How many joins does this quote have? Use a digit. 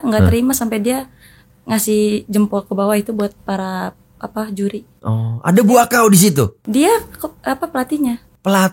0